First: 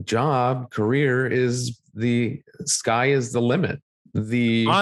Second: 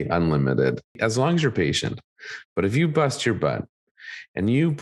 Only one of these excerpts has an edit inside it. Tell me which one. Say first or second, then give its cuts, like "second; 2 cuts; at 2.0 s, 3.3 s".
second; 1 cut; at 1.0 s